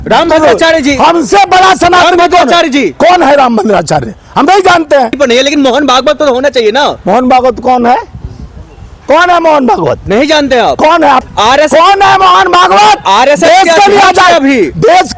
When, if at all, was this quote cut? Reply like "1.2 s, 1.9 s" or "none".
5.1 s